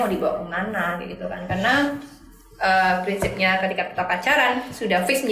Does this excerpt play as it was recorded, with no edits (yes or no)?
yes